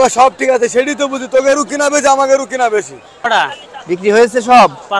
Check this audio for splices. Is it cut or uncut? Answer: cut